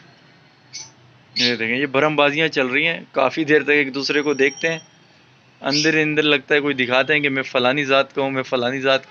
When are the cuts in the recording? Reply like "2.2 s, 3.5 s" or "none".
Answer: none